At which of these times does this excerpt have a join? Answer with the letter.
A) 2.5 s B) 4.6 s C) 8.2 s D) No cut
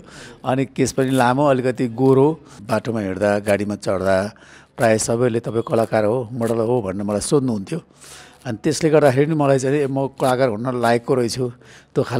A